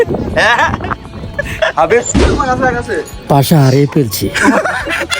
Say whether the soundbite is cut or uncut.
cut